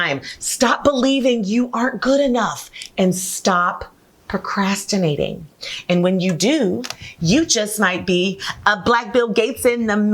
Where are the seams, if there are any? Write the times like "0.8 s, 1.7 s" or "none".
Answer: 5.6 s